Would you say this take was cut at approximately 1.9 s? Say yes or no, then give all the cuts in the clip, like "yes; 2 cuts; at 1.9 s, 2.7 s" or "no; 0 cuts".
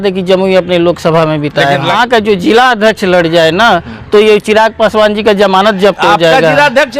yes; 1 cut; at 1.9 s